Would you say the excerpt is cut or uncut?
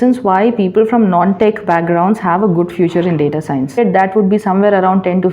cut